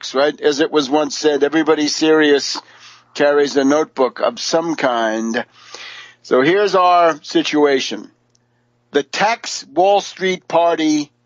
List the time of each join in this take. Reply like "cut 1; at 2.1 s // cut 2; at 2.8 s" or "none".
cut 1; at 3.1 s